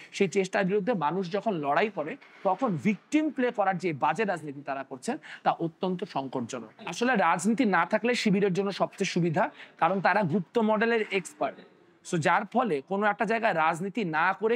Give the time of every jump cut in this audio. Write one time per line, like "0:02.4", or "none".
none